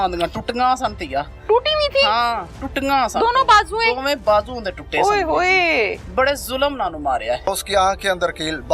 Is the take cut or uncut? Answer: cut